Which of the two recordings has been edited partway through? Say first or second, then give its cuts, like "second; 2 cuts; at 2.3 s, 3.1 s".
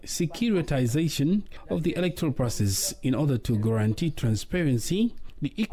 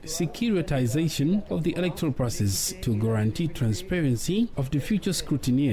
second; 3 cuts; at 1.5 s, 2.8 s, 4.6 s